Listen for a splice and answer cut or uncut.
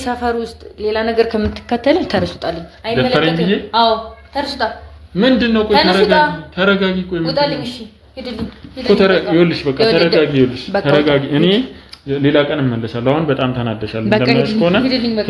uncut